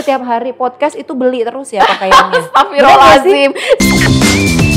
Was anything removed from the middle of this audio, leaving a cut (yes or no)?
yes